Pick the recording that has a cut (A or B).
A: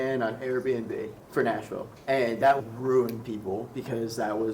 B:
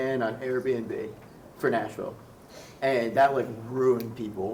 A